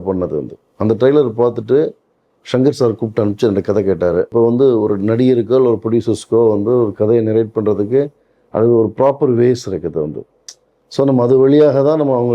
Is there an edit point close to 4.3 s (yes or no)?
yes